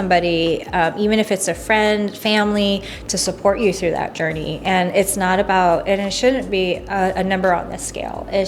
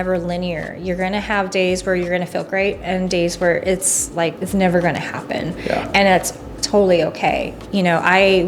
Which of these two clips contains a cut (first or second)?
second